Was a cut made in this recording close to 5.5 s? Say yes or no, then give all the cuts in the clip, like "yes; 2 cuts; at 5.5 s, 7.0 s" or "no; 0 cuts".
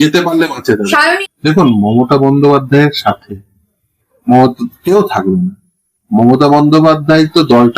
no; 1 cut; at 1.2 s